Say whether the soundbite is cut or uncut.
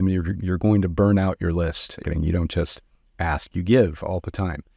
cut